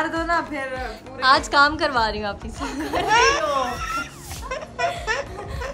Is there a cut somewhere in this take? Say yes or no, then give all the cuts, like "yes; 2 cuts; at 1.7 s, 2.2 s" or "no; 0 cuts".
yes; 1 cut; at 2.9 s